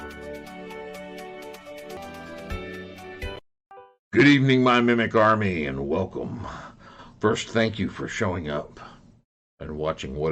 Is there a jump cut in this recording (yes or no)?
yes